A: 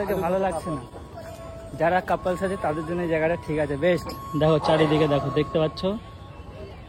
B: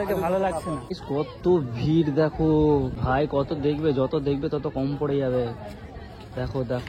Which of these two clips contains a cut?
B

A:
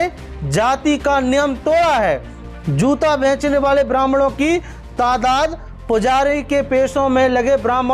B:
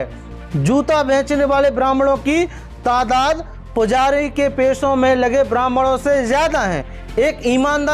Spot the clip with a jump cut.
B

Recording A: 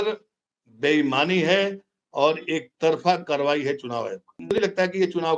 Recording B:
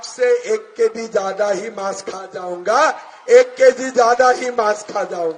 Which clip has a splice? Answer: A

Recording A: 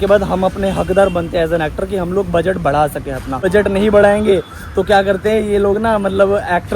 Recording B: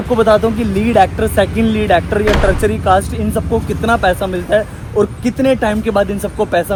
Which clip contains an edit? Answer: A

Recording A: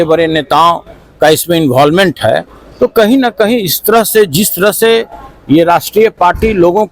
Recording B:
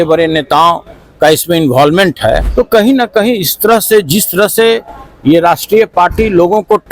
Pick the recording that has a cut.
B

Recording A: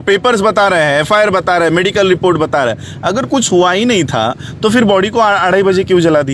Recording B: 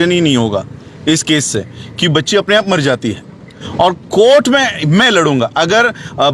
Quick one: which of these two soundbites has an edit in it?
B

